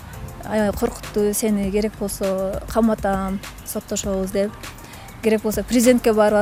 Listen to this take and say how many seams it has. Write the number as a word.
zero